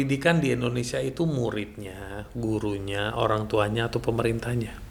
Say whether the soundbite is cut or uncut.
uncut